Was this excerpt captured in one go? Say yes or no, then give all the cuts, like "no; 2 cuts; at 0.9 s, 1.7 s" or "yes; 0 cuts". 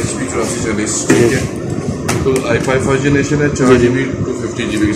yes; 0 cuts